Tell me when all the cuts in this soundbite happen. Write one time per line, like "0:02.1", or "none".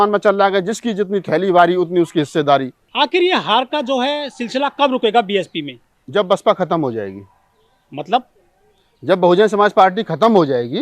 0:02.8